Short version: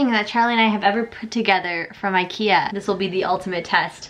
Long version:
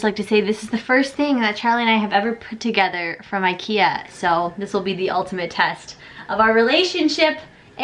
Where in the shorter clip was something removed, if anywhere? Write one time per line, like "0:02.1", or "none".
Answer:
0:02.8